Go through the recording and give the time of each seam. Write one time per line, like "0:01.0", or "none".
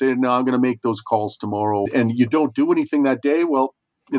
0:01.9

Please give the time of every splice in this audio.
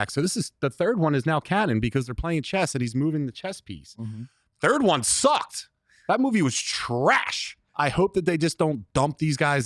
0:07.6

